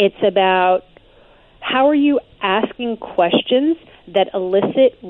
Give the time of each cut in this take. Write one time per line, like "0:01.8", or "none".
none